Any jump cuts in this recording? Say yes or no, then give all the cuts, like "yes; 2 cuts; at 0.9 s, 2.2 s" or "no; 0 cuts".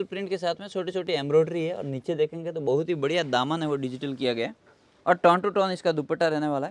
no; 0 cuts